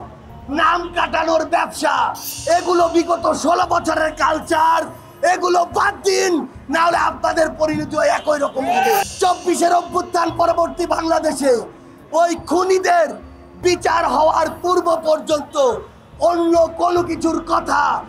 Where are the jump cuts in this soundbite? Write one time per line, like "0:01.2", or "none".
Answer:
0:02.3
0:09.0